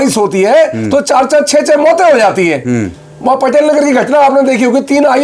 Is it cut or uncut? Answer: uncut